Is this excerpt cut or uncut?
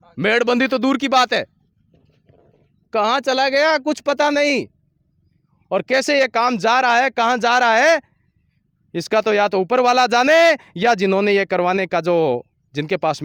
uncut